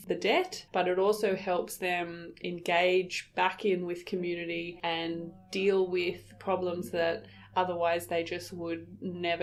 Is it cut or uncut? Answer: uncut